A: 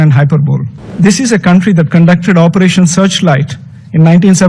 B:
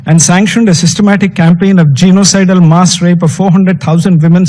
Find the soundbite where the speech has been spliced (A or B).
A